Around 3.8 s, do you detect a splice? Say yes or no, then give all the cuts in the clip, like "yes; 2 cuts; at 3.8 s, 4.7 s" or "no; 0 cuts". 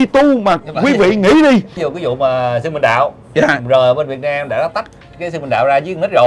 no; 1 cut; at 1.8 s